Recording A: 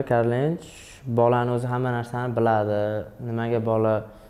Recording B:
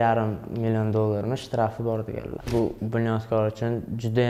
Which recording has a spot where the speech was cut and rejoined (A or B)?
B